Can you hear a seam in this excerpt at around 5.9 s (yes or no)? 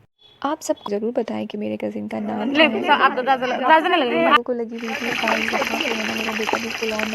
no